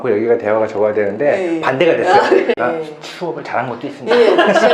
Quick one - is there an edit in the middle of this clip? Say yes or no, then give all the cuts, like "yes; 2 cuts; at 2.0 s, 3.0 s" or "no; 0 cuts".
yes; 1 cut; at 2.5 s